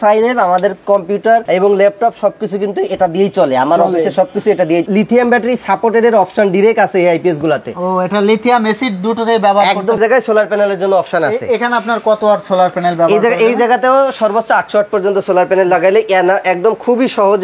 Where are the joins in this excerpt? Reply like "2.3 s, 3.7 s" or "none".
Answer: 1.4 s, 4.9 s, 10.0 s

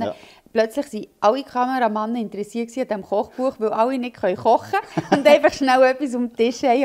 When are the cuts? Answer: none

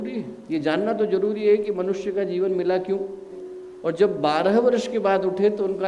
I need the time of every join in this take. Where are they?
3.4 s

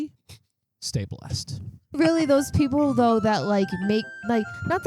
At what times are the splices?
2.0 s

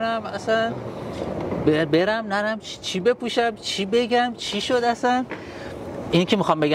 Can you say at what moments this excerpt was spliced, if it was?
none

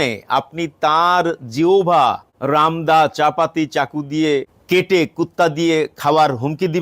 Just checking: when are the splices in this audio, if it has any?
2.3 s, 4.5 s

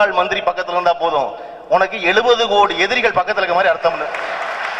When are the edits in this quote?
none

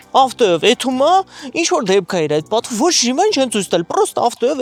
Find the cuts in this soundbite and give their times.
none

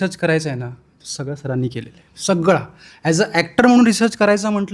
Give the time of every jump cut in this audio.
none

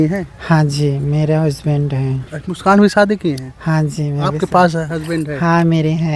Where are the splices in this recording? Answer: none

